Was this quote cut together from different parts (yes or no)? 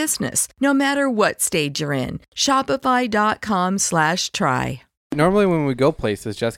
yes